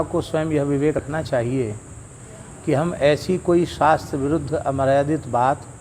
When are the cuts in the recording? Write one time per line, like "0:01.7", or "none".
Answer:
0:01.0